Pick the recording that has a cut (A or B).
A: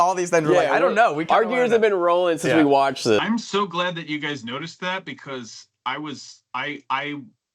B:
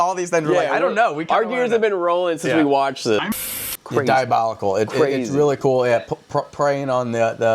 B